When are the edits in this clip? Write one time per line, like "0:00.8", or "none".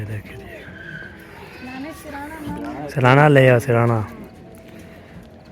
none